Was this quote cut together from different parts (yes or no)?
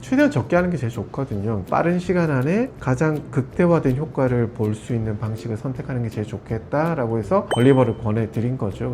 yes